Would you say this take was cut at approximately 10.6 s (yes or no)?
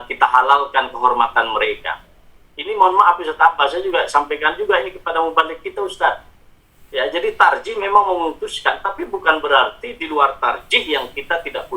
no